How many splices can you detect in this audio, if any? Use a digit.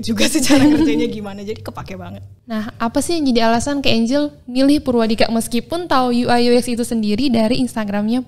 0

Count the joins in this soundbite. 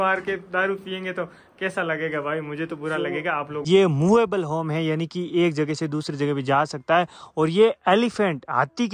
1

